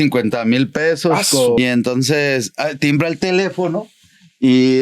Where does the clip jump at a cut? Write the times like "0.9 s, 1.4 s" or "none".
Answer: 1.6 s